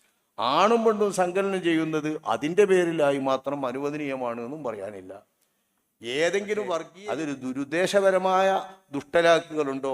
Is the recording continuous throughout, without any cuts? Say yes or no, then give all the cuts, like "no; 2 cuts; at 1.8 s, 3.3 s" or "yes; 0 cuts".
no; 1 cut; at 6.9 s